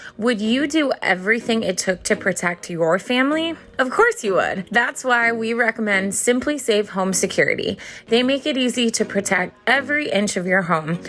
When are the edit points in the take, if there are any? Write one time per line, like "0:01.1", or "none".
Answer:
none